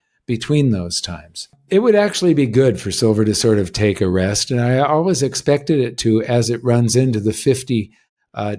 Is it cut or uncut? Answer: cut